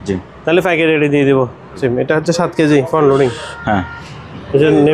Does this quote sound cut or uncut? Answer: cut